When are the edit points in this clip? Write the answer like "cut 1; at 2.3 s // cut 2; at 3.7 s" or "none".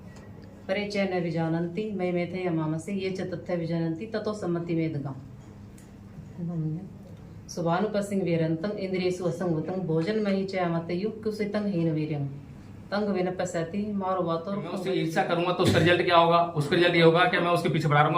cut 1; at 14.8 s